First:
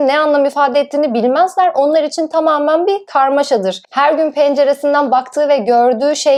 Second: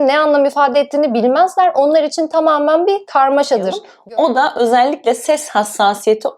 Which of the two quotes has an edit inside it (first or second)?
second